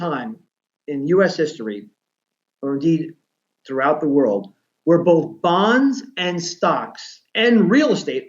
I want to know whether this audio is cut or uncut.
uncut